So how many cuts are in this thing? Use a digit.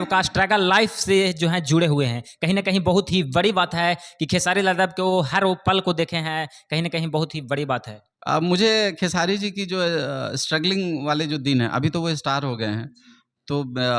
0